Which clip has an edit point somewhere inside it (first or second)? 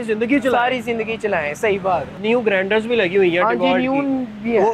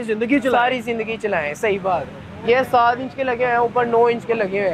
first